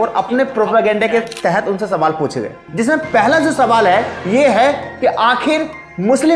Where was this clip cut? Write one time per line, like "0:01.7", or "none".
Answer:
0:02.6